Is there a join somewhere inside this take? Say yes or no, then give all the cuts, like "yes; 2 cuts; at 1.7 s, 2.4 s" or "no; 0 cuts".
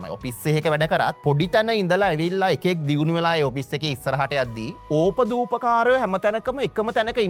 no; 0 cuts